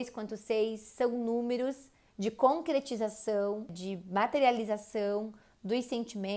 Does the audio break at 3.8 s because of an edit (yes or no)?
yes